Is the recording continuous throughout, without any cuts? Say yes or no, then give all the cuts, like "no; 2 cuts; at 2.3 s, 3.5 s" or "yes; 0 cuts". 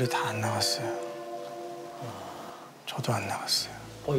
no; 1 cut; at 2.3 s